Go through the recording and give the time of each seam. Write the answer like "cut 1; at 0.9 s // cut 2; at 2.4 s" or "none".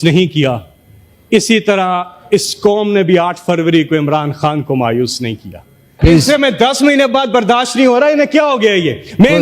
cut 1; at 5.9 s